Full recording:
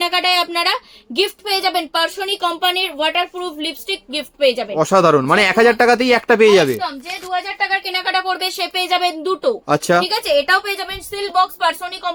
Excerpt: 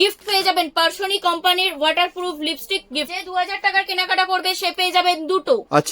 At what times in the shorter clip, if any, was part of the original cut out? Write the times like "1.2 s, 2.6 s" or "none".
3.0 s